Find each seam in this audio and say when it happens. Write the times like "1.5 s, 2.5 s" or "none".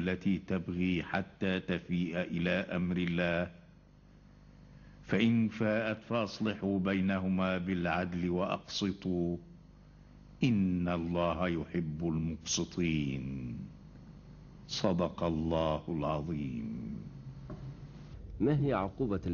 3.6 s